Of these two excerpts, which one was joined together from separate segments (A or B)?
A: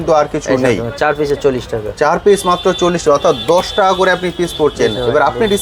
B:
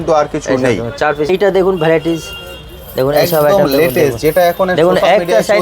B